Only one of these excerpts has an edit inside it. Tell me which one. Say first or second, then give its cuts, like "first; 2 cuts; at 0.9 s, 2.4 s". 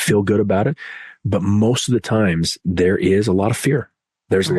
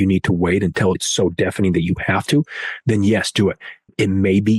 second; 1 cut; at 1.1 s